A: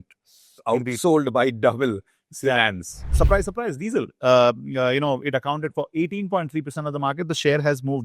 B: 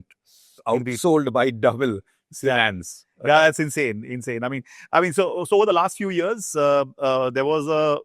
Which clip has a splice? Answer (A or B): A